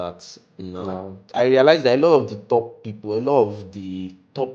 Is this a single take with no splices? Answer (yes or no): no